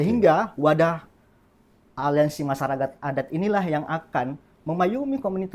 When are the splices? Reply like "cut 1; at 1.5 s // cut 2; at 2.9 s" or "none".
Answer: none